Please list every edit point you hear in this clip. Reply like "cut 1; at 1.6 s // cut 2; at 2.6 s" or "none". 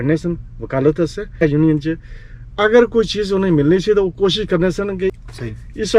cut 1; at 1.4 s // cut 2; at 5.2 s